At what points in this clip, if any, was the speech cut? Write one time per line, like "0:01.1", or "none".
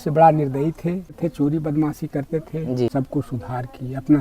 0:01.2
0:02.9